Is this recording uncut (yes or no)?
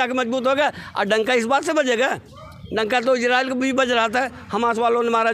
yes